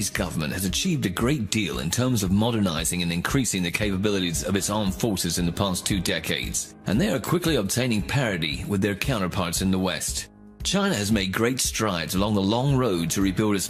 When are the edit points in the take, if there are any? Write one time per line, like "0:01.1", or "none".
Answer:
0:07.9